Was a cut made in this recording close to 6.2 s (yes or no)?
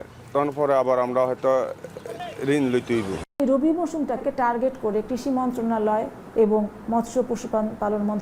no